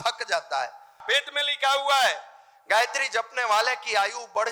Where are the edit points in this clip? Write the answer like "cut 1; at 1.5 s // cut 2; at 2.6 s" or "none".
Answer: cut 1; at 1.1 s